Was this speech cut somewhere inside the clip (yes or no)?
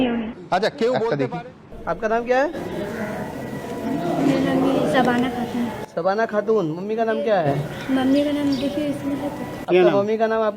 yes